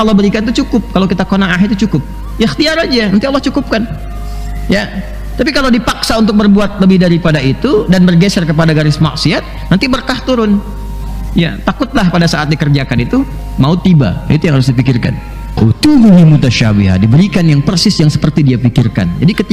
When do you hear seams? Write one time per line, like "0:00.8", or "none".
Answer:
0:15.6